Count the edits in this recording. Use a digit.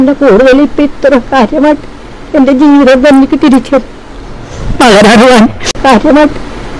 1